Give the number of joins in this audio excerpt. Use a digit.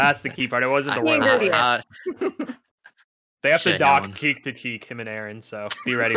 0